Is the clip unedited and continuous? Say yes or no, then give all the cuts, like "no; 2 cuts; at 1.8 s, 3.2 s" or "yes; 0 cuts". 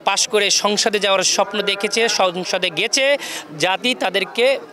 yes; 0 cuts